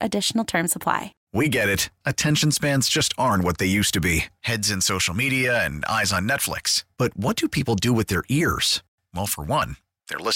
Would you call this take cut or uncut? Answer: cut